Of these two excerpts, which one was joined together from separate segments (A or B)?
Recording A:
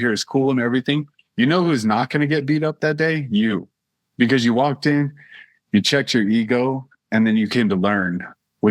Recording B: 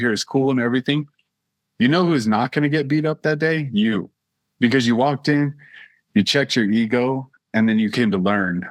A